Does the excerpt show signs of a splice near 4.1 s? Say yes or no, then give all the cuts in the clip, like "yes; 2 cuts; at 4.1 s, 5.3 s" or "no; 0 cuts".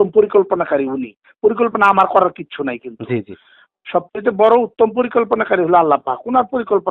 no; 0 cuts